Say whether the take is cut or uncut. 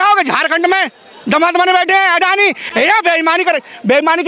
uncut